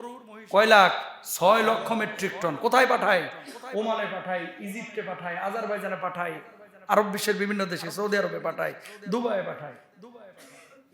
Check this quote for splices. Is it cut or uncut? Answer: uncut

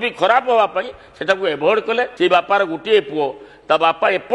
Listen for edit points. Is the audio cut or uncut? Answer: cut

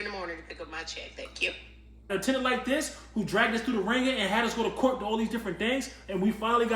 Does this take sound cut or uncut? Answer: cut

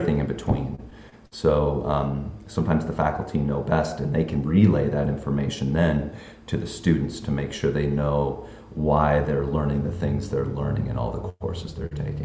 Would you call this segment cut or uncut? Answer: uncut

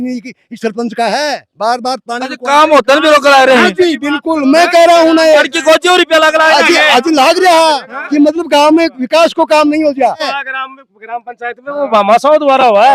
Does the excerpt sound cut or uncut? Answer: cut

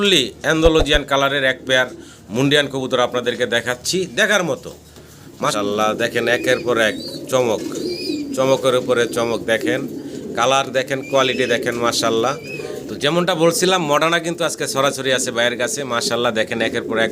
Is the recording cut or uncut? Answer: cut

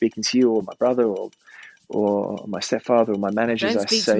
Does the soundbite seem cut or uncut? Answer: uncut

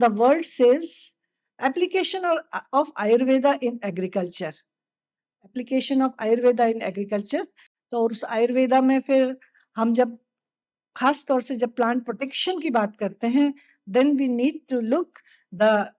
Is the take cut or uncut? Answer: uncut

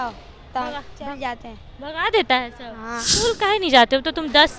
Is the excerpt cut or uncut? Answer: cut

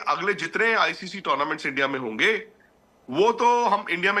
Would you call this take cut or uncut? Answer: uncut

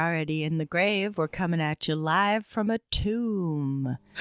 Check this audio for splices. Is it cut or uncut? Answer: uncut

